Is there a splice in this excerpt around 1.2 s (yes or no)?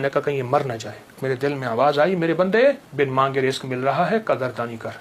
yes